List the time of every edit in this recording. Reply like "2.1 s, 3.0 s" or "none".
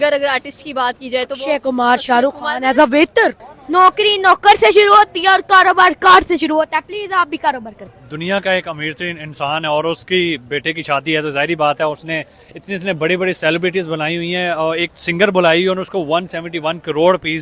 3.5 s, 7.7 s

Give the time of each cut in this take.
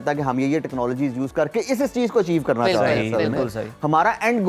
none

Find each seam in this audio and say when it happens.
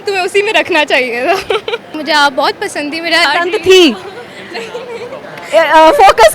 1.9 s, 3.2 s

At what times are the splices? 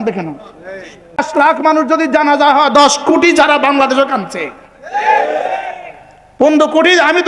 1.2 s

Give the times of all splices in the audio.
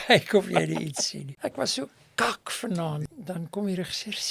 1.2 s, 3.0 s

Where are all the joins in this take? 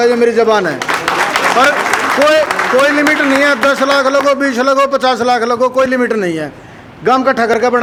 none

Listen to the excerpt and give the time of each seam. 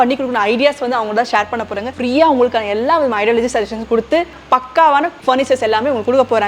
1.9 s, 4.3 s

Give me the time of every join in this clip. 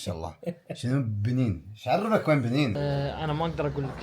2.8 s

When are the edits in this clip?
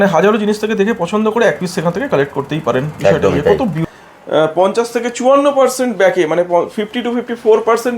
3.9 s

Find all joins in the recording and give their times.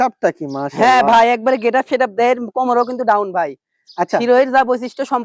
none

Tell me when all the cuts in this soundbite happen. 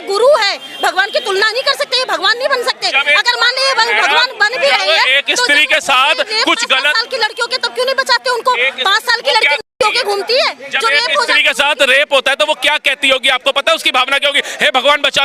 none

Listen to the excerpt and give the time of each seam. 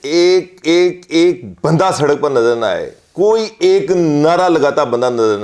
none

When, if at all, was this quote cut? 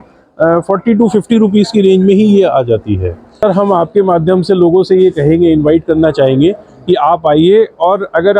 3.4 s

